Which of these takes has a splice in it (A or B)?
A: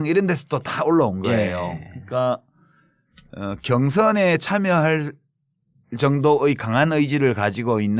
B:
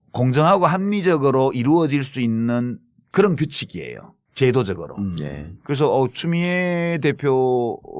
A